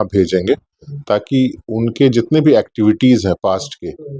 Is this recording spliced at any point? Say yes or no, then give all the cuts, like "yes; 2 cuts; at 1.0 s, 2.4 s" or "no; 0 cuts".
no; 0 cuts